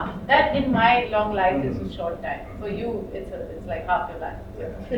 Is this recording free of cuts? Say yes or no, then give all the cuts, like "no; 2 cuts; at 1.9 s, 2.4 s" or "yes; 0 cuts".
yes; 0 cuts